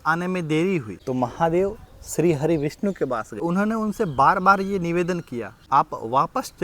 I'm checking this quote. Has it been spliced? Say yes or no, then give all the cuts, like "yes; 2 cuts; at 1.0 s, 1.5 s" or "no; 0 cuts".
yes; 3 cuts; at 0.9 s, 3.4 s, 5.5 s